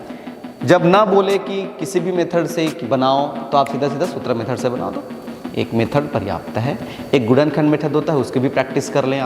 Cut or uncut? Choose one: uncut